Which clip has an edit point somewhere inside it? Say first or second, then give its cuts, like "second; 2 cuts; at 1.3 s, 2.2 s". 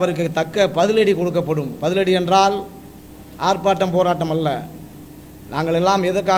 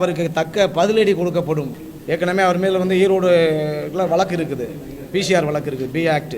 second; 1 cut; at 1.7 s